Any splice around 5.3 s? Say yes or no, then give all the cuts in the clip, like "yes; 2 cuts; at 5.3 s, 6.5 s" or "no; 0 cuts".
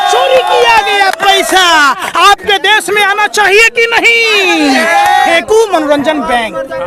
yes; 1 cut; at 5.3 s